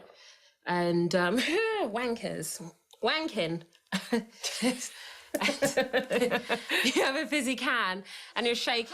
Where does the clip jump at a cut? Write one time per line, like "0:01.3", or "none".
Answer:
0:03.8